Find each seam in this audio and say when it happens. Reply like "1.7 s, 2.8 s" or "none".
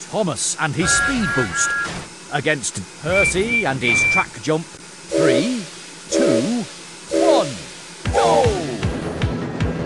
2.8 s